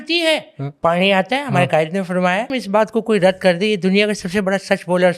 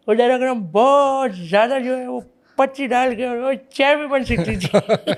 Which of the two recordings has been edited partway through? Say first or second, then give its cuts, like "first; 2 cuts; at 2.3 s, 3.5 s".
first; 1 cut; at 2.5 s